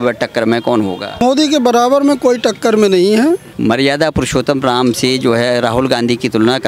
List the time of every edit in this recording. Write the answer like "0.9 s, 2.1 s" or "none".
1.2 s, 3.5 s